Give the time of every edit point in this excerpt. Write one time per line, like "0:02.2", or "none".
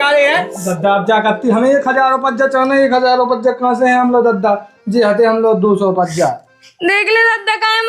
none